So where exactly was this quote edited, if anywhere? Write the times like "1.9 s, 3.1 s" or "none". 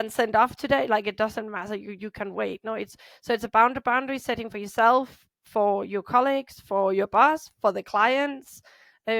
none